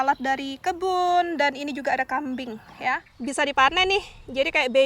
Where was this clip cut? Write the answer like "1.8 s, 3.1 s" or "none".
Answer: 3.1 s